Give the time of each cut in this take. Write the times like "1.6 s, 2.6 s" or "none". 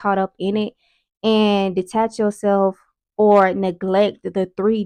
none